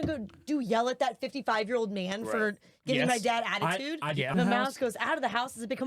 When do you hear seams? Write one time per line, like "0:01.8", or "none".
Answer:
0:04.3